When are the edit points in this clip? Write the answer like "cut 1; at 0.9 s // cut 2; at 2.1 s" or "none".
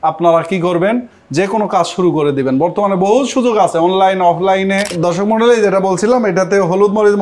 cut 1; at 4.9 s